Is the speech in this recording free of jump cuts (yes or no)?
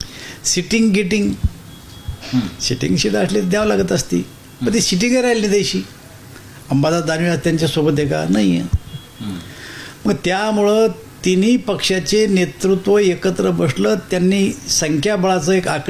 yes